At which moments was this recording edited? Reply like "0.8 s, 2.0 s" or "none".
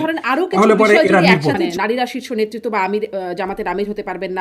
1.7 s